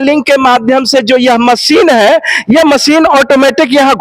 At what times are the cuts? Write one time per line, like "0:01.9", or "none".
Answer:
none